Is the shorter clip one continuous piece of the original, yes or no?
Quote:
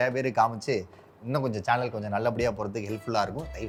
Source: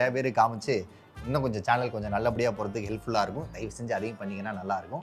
yes